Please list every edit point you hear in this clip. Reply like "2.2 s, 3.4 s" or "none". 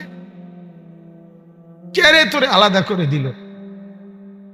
3.5 s